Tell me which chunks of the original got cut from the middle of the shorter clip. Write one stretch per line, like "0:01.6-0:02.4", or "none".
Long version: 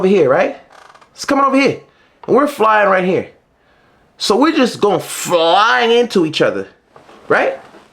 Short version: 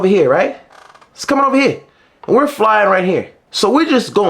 0:03.4-0:04.1

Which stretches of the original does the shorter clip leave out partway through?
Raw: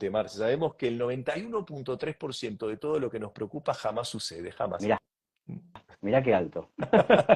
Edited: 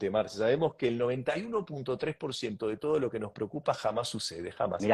none

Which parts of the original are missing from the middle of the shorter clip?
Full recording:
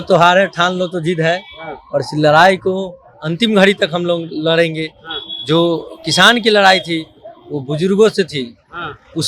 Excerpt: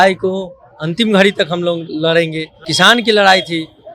0:05.0-0:06.0

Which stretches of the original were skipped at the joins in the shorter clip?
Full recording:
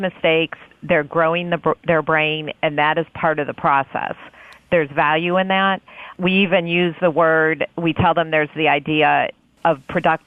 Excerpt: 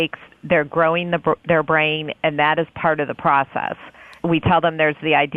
0:04.5-0:07.7

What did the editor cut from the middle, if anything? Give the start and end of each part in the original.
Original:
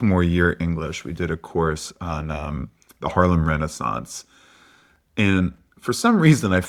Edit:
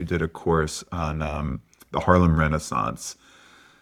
none

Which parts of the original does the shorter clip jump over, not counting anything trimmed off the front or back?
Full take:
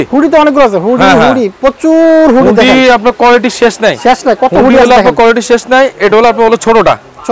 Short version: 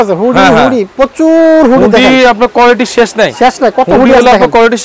none

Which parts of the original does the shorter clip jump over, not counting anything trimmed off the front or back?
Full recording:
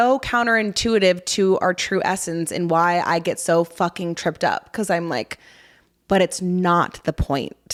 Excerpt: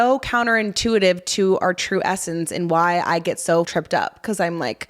0:03.7-0:04.2

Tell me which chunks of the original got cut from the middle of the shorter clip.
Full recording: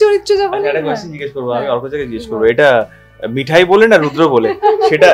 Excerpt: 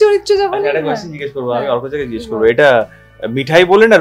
none

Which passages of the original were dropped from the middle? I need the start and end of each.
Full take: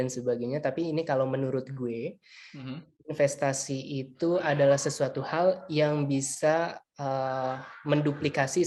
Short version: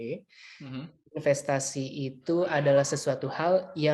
none

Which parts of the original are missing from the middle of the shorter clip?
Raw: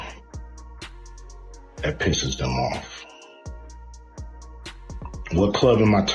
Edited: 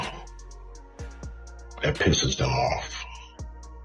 0:02.9-0:03.7

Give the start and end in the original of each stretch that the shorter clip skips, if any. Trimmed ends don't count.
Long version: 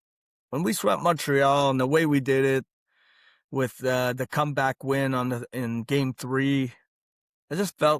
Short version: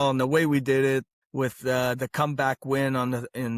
0:02.8-0:03.4

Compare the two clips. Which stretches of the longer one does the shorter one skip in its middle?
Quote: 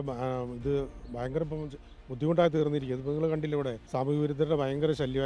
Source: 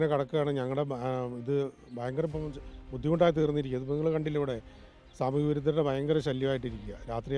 0:04.6-0:05.1

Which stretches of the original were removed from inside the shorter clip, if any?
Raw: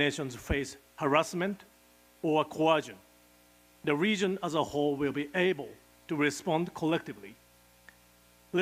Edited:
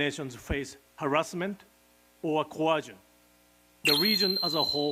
none

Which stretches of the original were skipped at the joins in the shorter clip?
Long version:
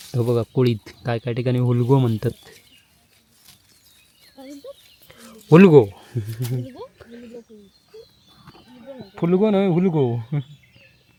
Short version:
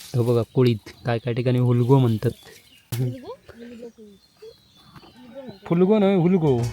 0:02.9-0:06.5

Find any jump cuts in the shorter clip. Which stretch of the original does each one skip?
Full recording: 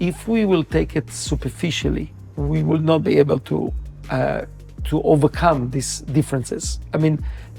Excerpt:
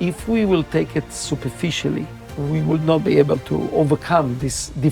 0:03.7-0:05.0

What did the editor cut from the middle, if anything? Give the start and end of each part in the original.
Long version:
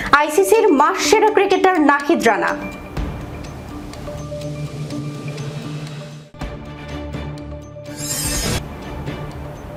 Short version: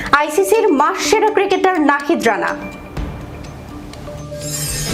none

